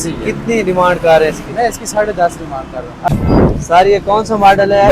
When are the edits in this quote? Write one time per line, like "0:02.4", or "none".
0:03.1